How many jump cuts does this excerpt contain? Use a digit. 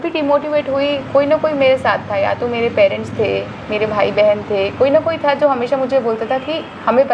0